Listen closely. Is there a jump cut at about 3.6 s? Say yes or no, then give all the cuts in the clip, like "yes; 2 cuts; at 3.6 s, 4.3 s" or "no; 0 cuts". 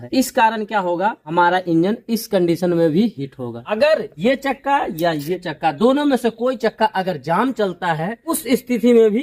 no; 0 cuts